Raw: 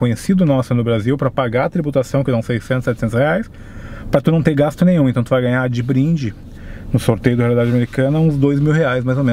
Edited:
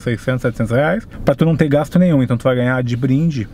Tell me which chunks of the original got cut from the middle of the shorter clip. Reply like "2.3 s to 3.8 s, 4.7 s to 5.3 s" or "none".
3.5 s to 4.0 s